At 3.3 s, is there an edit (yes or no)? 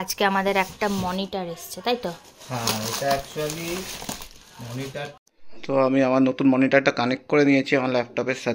no